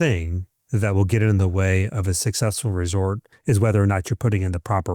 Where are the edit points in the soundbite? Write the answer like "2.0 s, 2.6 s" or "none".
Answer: 3.3 s

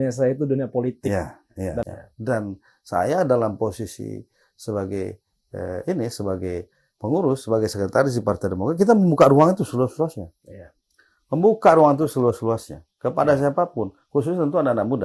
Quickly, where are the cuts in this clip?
1.8 s

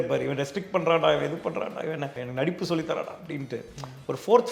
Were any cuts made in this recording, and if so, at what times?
2.2 s

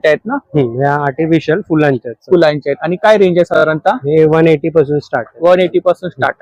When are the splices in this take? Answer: none

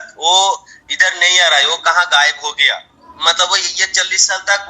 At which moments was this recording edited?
3.0 s

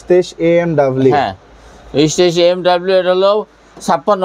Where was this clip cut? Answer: none

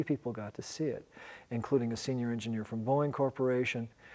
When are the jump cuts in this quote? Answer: 1.4 s

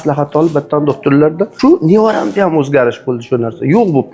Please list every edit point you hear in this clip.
1.5 s

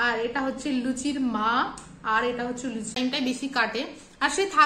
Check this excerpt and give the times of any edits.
3.0 s

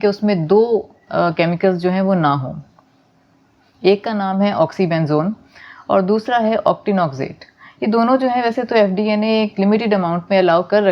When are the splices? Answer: none

